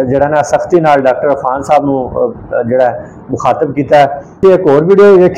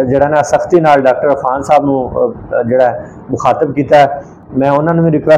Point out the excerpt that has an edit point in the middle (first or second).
first